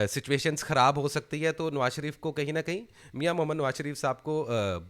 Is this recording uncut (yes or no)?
yes